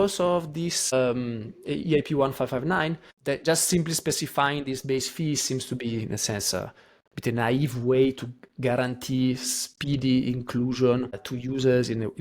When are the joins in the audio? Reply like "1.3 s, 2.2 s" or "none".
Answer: 0.9 s, 3.1 s, 11.3 s